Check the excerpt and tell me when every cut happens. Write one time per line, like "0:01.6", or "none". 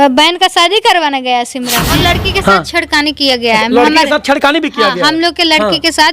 0:01.8